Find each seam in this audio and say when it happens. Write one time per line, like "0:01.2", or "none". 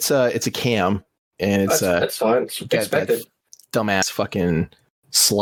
none